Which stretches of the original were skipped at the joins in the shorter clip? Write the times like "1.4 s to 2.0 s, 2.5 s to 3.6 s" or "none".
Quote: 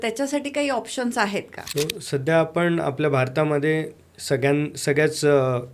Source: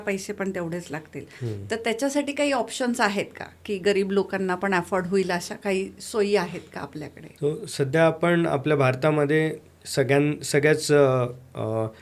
3.4 s to 7.2 s